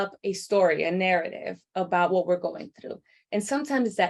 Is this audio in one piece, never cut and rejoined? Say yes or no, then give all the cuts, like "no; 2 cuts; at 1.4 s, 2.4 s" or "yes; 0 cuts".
yes; 0 cuts